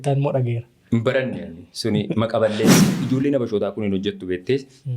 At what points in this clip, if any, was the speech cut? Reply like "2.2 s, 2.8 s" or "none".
2.9 s